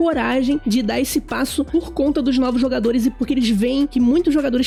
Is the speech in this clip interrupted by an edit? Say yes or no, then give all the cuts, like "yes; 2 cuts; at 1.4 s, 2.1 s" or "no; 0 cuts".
no; 0 cuts